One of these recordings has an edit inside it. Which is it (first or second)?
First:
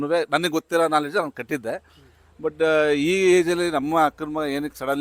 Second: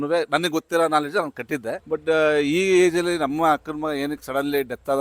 second